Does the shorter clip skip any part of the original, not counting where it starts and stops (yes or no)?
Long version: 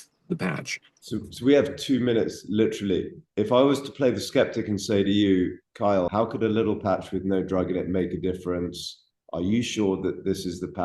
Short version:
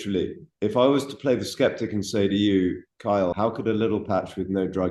no